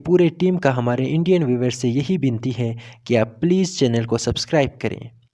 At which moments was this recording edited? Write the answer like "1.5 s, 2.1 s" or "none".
none